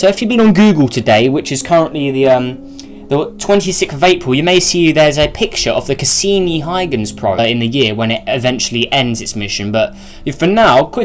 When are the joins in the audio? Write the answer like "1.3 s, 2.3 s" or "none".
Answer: none

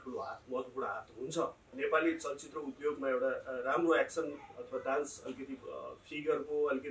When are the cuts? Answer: 1.6 s

